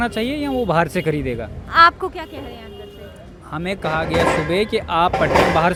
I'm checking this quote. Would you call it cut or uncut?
uncut